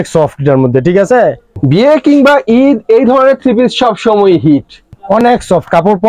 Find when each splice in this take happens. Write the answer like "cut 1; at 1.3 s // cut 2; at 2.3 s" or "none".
cut 1; at 1.5 s // cut 2; at 4.9 s